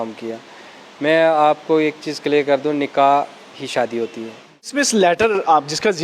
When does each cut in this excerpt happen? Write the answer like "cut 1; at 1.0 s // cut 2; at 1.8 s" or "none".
cut 1; at 4.7 s